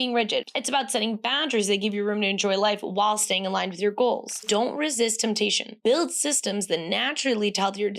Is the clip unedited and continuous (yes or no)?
no